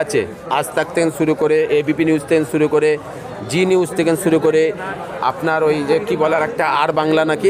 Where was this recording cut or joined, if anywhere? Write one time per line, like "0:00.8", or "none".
none